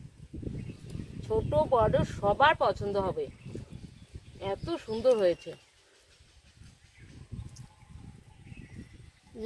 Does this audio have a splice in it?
no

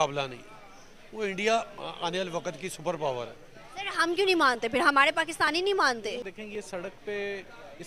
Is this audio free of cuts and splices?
no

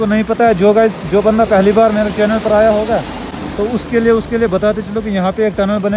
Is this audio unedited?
yes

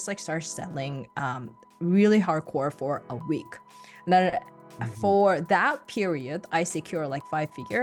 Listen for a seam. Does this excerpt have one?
no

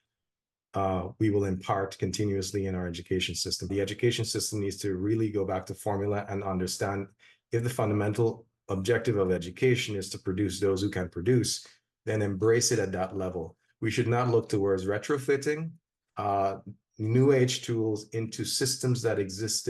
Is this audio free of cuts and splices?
no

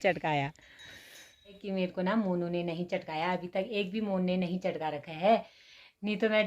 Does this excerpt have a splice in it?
yes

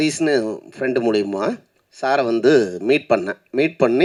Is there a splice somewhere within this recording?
no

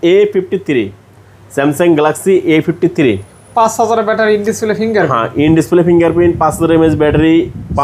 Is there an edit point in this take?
no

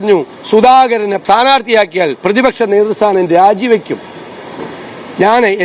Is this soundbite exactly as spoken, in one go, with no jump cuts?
no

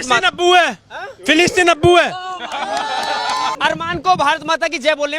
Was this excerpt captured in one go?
no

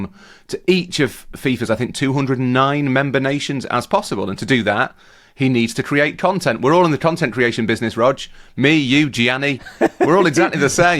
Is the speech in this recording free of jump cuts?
yes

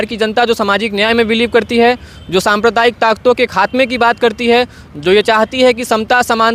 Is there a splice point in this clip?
no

